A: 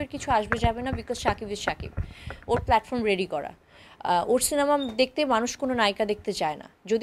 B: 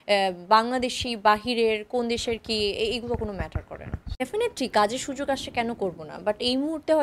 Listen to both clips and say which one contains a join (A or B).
B